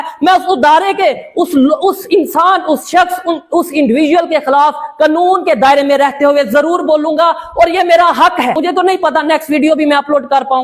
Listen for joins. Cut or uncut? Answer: cut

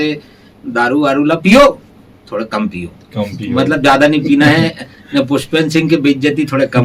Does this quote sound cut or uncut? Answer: uncut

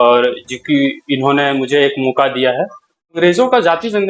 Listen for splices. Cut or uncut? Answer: cut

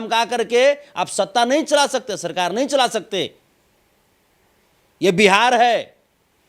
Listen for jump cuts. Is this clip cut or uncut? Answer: uncut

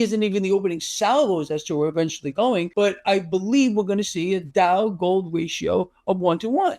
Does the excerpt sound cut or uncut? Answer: cut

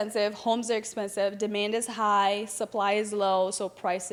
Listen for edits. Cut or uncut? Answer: uncut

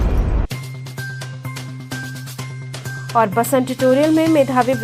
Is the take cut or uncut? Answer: cut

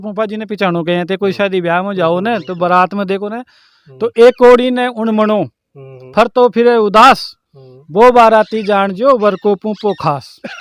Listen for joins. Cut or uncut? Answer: uncut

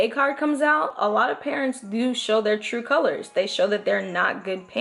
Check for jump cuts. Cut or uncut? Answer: uncut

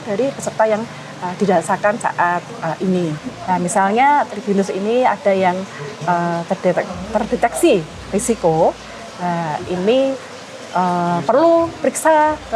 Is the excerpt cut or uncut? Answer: cut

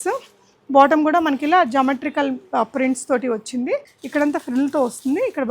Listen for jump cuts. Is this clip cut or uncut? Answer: cut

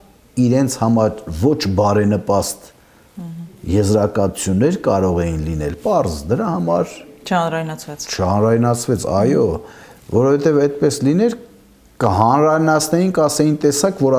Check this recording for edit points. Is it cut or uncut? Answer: uncut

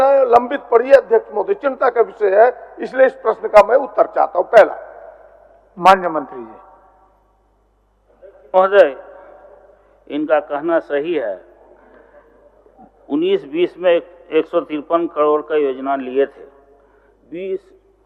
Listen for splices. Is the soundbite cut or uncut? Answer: uncut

